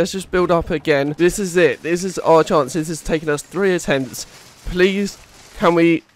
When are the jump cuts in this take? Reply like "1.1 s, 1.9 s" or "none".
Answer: 1.1 s